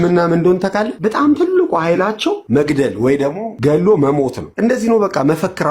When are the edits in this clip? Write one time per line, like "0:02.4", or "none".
0:00.9
0:02.4
0:03.5
0:04.4